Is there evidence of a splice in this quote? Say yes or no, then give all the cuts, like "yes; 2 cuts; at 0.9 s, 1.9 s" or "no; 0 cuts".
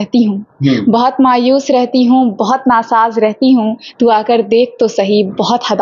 no; 0 cuts